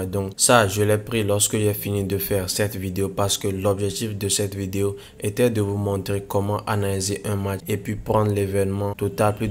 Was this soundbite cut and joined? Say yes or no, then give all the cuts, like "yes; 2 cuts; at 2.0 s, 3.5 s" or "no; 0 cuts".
no; 0 cuts